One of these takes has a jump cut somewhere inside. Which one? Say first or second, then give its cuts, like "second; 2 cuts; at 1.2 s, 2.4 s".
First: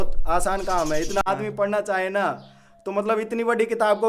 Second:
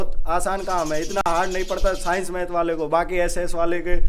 first; 1 cut; at 1.2 s